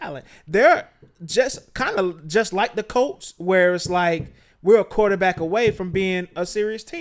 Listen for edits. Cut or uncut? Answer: uncut